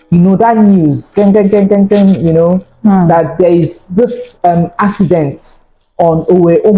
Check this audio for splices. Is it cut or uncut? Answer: uncut